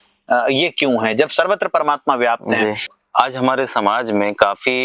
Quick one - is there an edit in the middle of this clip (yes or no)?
yes